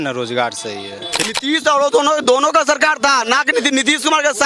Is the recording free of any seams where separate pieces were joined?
no; 1 cut; at 1.2 s

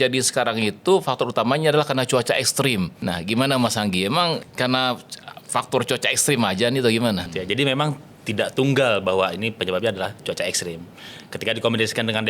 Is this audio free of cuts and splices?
no; 3 cuts; at 3.0 s, 4.5 s, 7.3 s

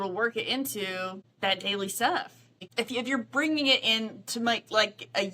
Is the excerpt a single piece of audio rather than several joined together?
no; 2 cuts; at 1.2 s, 2.7 s

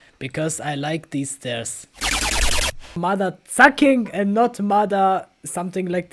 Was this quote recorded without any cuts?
no; 1 cut; at 3.0 s

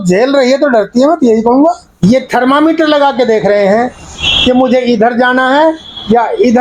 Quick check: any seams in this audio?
yes; 1 cut; at 1.9 s

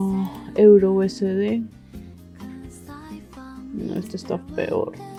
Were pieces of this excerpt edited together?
no; 0 cuts

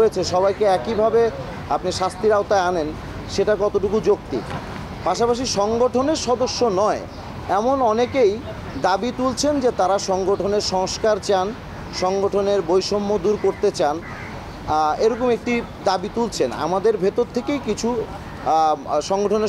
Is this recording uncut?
yes; 0 cuts

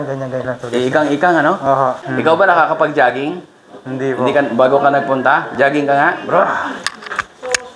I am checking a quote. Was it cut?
yes; 1 cut; at 2.0 s

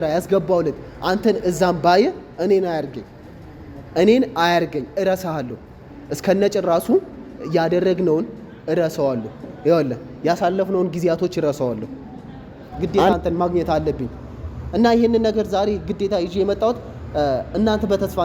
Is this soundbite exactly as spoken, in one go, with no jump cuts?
no; 1 cut; at 12.4 s

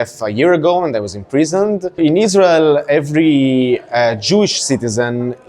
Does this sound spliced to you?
yes; 1 cut; at 2.0 s

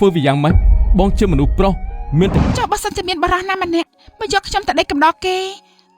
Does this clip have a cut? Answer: yes; 2 cuts; at 2.4 s, 3.9 s

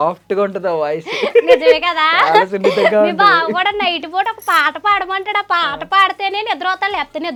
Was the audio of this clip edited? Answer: no; 0 cuts

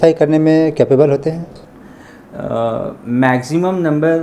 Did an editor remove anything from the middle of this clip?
no; 0 cuts

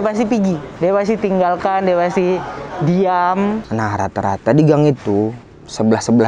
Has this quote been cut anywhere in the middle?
yes; 1 cut; at 3.6 s

